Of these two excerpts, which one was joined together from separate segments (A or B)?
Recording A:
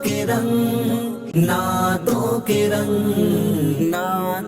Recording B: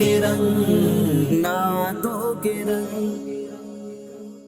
A